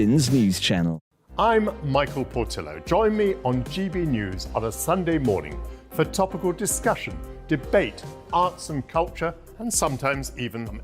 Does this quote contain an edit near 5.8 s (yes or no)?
no